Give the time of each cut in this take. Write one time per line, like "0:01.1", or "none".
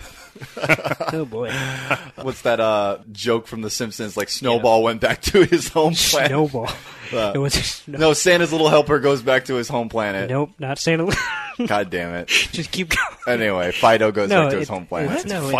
0:02.2
0:03.1